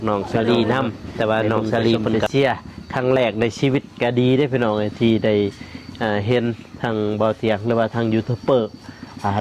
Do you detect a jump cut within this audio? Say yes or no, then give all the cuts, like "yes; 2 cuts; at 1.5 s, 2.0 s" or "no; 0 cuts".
yes; 1 cut; at 2.2 s